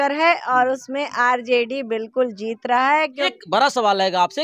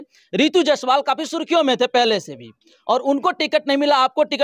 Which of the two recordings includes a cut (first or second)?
first